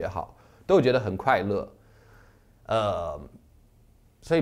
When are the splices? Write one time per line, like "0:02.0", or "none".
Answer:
none